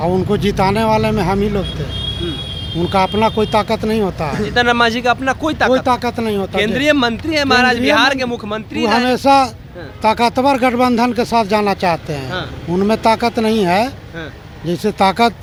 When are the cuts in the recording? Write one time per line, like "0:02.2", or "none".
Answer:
none